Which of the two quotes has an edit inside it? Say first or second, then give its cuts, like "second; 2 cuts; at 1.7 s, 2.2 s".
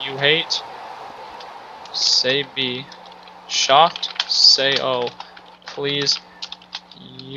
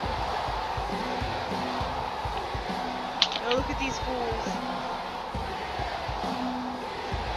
first; 1 cut; at 0.9 s